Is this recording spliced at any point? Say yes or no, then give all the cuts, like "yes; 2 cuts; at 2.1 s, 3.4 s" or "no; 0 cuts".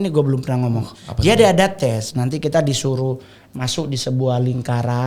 no; 0 cuts